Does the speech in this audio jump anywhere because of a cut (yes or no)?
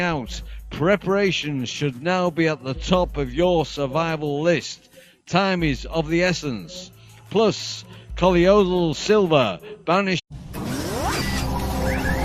no